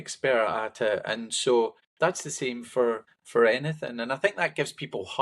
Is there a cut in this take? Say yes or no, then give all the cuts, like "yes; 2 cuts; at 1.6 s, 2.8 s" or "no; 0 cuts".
yes; 2 cuts; at 1.8 s, 3.1 s